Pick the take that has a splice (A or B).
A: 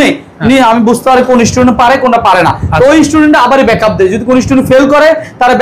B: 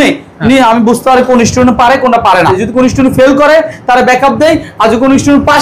B